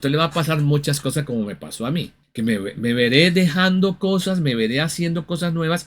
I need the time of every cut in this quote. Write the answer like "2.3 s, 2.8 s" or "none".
2.2 s